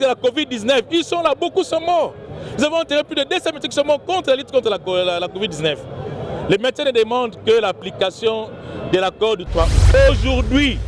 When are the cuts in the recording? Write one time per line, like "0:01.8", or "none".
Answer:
0:09.9